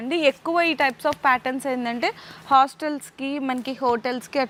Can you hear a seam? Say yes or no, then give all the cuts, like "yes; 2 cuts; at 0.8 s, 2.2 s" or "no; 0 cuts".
no; 0 cuts